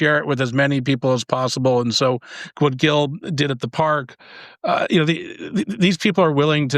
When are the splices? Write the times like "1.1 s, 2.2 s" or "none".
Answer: none